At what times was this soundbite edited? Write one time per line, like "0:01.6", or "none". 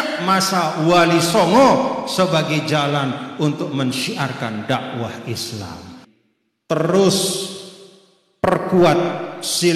0:06.0